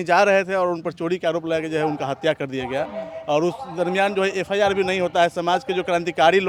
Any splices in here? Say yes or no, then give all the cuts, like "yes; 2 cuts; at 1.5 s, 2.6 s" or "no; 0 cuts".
no; 0 cuts